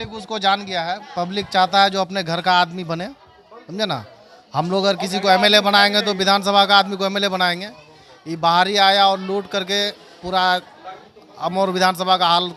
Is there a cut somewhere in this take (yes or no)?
no